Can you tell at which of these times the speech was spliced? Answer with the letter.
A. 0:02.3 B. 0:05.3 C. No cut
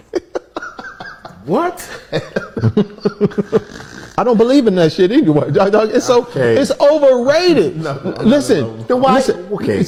C